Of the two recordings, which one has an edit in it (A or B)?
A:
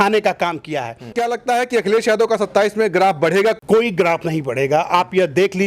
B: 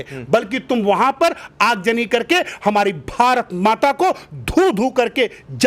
A